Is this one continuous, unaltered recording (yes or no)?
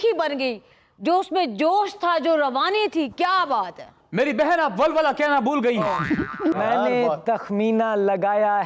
no